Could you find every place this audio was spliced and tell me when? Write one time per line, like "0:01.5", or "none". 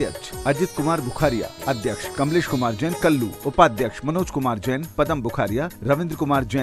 0:02.0
0:03.3